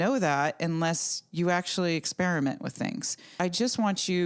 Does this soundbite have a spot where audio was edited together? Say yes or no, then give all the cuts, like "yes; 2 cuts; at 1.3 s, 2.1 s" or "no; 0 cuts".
yes; 1 cut; at 3.4 s